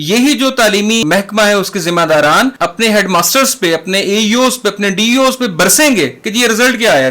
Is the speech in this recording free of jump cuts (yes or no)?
no